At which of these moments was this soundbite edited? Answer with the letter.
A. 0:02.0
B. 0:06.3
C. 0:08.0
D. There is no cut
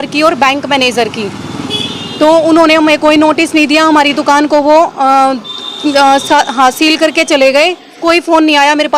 C